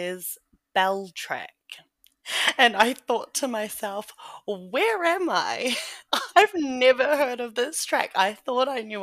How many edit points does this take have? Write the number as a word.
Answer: one